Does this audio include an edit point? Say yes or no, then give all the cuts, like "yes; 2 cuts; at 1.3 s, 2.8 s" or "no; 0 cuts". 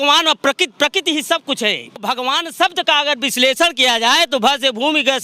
yes; 1 cut; at 2.0 s